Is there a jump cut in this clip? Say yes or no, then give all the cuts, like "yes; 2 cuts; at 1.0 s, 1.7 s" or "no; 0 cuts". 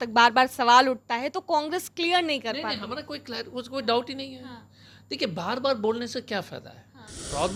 no; 0 cuts